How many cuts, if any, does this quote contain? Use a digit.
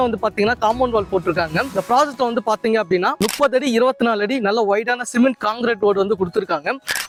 0